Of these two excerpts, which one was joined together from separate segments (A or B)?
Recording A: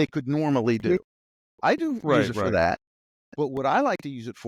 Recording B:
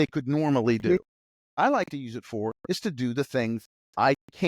B